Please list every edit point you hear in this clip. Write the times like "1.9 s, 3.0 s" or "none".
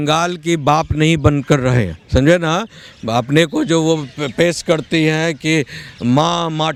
none